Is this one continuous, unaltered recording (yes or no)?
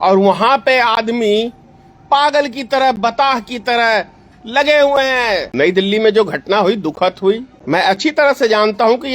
no